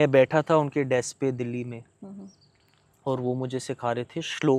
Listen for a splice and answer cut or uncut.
uncut